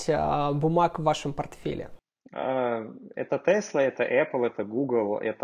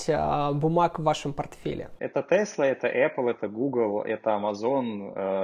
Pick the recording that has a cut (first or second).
second